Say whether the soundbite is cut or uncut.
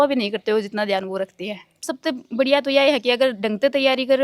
cut